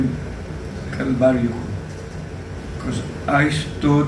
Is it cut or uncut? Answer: uncut